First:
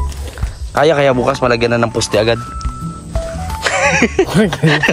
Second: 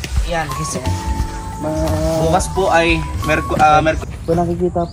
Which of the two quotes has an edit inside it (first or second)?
second